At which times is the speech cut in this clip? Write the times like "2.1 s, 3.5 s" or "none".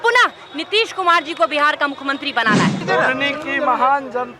2.8 s